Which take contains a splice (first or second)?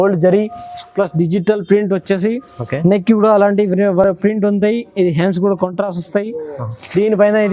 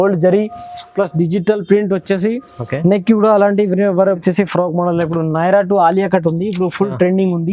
second